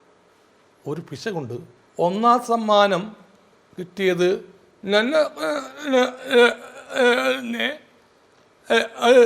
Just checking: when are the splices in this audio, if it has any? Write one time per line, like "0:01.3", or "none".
0:01.8